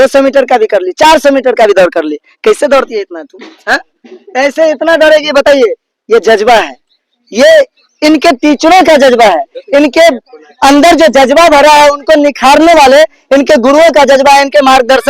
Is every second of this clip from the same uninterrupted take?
yes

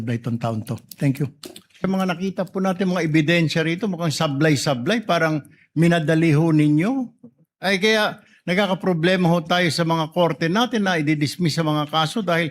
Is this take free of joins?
no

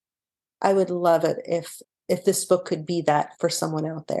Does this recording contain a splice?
yes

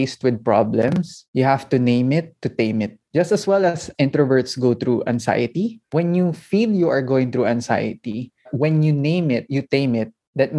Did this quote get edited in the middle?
yes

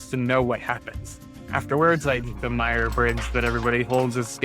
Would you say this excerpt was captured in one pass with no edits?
no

